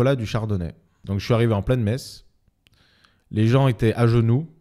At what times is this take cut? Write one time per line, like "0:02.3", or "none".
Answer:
0:01.0